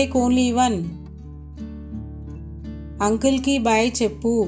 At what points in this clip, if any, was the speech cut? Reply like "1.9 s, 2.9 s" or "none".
1.0 s, 2.5 s